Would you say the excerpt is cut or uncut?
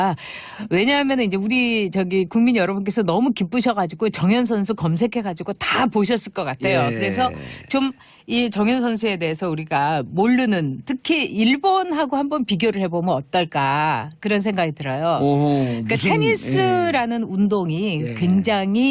uncut